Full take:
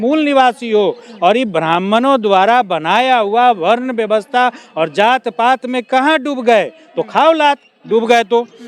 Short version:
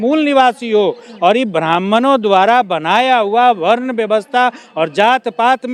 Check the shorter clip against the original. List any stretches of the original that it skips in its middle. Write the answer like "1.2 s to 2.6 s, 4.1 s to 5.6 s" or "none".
none

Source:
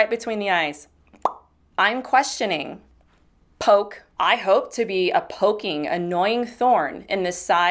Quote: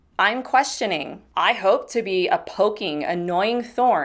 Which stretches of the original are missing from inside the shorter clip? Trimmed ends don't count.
2.8 s to 4.0 s

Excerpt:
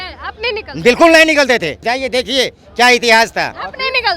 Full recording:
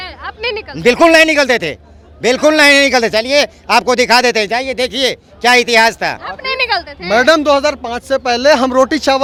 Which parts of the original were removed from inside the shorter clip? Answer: 1.9 s to 4.5 s

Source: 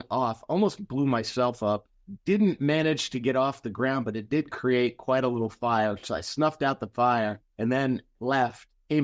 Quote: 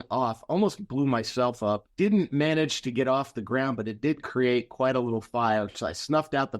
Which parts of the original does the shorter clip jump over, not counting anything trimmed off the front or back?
1.9 s to 2.1 s

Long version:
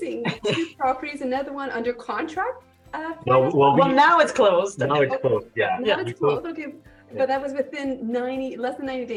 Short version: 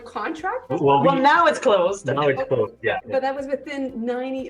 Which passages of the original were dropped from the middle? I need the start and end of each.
2.6 s to 3.4 s, 5.7 s to 7.1 s

